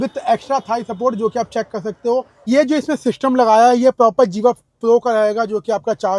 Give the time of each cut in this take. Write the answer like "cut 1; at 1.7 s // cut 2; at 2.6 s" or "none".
cut 1; at 2.5 s